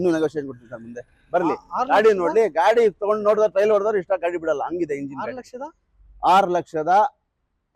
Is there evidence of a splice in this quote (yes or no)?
no